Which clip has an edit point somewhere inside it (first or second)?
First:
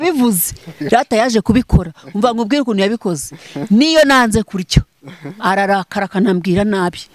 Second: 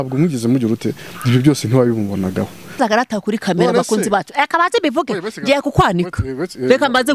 second